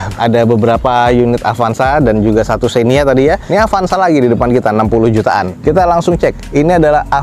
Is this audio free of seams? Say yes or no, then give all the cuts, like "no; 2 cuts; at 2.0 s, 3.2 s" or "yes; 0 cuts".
yes; 0 cuts